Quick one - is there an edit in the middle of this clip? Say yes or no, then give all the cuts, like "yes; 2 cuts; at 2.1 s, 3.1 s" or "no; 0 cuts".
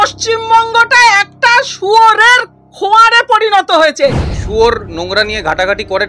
yes; 1 cut; at 4.3 s